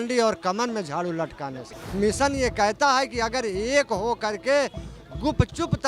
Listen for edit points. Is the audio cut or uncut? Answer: cut